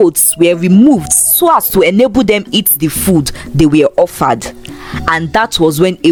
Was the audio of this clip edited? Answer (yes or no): no